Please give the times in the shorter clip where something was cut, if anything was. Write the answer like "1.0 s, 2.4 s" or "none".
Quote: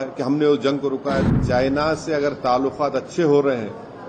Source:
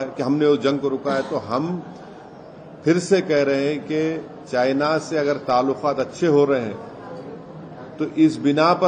1.3 s